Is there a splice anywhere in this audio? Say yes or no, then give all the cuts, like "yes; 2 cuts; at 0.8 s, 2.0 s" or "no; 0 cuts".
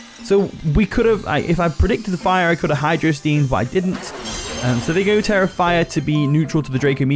no; 0 cuts